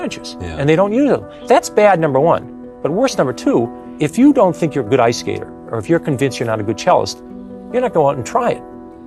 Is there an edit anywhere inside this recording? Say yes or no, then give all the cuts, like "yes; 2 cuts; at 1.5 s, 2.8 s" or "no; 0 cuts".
yes; 2 cuts; at 1.3 s, 3.8 s